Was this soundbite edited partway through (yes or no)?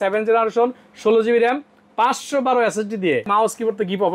yes